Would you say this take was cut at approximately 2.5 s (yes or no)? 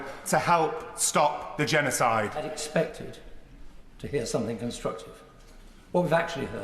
yes